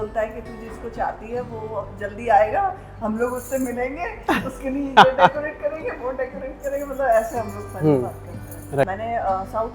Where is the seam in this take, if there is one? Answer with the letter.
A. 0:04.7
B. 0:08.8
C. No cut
B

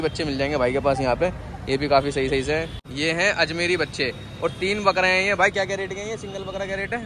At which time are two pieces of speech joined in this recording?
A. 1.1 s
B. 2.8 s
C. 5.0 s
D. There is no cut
B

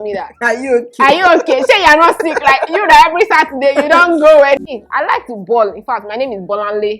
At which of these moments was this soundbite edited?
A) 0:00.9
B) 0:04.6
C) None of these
B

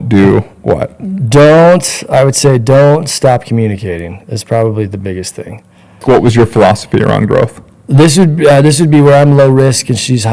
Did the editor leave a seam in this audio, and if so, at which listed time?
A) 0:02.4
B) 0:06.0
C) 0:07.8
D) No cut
B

